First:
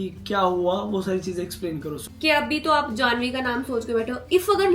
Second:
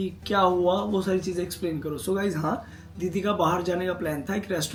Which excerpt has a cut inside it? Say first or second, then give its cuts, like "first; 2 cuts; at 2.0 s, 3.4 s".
first; 1 cut; at 2.0 s